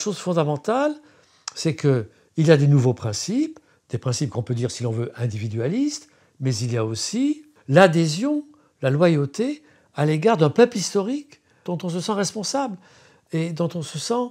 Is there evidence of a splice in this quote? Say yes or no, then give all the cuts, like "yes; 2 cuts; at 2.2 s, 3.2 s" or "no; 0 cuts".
yes; 2 cuts; at 7.5 s, 11.7 s